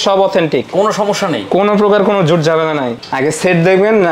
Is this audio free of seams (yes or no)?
no